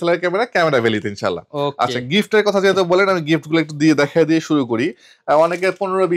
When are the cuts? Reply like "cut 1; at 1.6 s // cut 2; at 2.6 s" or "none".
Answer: none